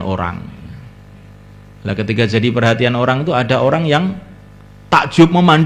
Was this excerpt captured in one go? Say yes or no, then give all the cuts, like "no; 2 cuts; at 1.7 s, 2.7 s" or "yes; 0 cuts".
yes; 0 cuts